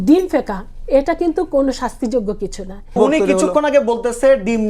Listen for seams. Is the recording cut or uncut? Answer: cut